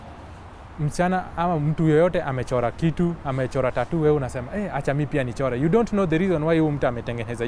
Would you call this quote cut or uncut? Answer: uncut